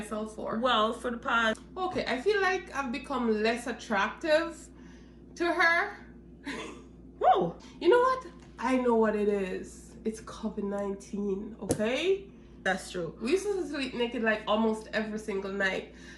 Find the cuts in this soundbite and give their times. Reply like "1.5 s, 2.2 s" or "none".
1.6 s, 7.6 s, 12.5 s